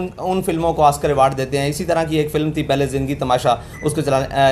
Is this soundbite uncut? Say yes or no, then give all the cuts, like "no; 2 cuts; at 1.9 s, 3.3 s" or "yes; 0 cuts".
yes; 0 cuts